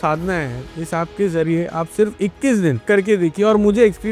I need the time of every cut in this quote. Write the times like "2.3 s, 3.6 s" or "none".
2.9 s